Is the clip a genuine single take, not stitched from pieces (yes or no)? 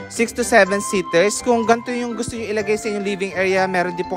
no